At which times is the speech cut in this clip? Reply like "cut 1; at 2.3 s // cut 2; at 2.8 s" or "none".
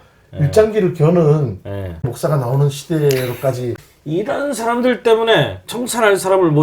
cut 1; at 2.1 s // cut 2; at 3.7 s